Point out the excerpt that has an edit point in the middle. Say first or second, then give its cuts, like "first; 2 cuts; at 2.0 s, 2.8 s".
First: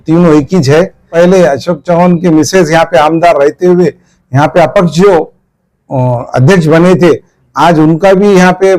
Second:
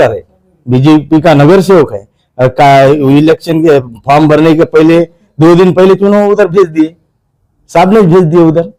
first; 1 cut; at 1.1 s